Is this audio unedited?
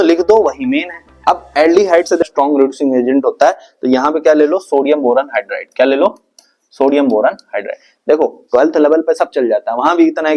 no; 1 cut; at 2.3 s

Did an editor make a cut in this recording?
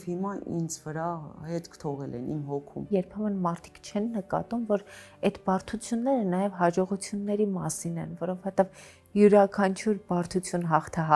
yes; 1 cut; at 2.9 s

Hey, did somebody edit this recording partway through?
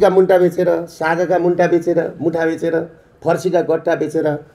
no; 0 cuts

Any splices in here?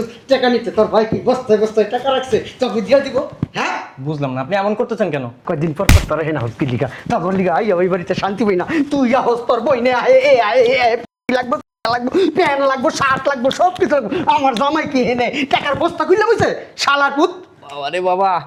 no; 0 cuts

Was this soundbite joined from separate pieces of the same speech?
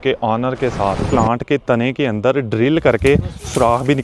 yes; 1 cut; at 1.0 s

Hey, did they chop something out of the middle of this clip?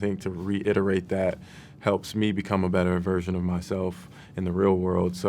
no; 0 cuts

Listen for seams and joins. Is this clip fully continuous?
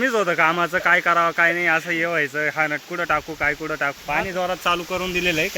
no; 1 cut; at 4.0 s

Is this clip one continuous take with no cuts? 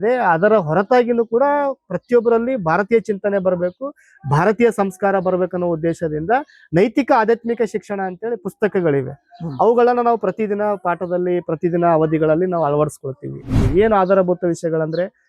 no; 1 cut; at 13.6 s

